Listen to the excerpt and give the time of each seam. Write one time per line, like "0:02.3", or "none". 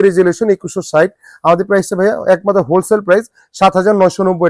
none